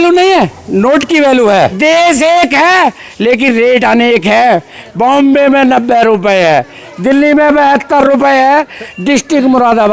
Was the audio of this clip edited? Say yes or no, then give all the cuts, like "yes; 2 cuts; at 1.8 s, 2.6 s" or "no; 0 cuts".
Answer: yes; 1 cut; at 1.7 s